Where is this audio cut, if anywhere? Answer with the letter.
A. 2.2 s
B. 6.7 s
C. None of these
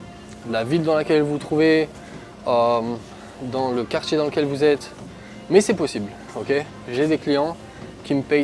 C